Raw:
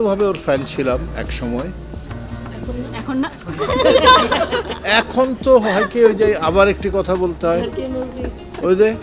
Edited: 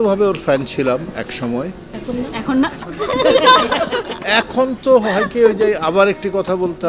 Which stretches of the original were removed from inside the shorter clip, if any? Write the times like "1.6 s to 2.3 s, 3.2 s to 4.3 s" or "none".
1.9 s to 2.5 s